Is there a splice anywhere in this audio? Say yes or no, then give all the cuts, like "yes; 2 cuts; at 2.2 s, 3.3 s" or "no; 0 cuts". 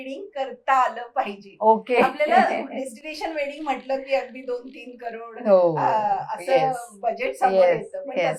no; 0 cuts